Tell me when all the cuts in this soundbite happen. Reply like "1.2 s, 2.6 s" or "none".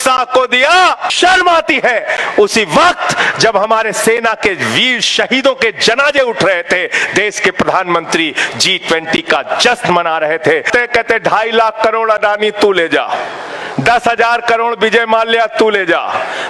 1.1 s, 10.7 s